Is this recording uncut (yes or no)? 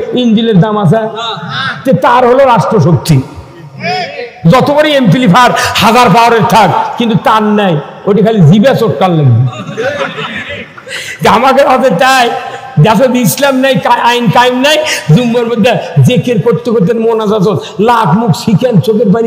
yes